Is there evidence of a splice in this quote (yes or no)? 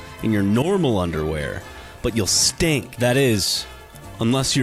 yes